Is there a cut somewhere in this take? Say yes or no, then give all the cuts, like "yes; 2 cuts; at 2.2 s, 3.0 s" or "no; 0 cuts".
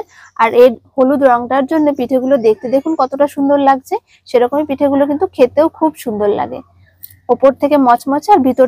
no; 0 cuts